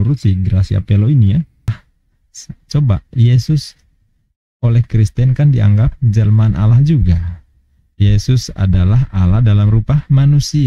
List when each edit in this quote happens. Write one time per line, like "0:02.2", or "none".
0:01.7